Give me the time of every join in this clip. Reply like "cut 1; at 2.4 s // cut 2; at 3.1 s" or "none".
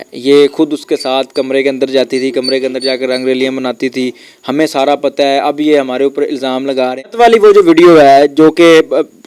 cut 1; at 6.9 s